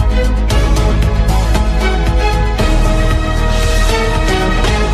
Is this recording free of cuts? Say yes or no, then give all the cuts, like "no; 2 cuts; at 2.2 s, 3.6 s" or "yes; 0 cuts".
yes; 0 cuts